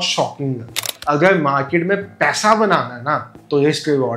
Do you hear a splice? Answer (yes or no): yes